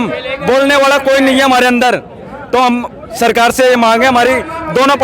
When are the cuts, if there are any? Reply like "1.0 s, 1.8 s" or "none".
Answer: none